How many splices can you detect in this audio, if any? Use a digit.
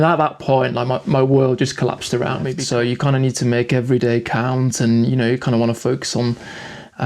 1